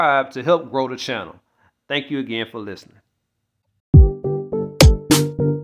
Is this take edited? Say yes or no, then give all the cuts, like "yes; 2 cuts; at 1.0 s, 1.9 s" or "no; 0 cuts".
yes; 1 cut; at 3.9 s